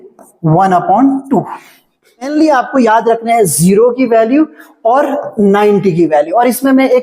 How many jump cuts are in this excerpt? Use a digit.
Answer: 1